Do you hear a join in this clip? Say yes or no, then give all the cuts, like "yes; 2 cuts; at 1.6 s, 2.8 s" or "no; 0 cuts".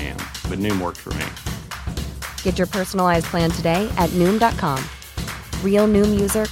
no; 0 cuts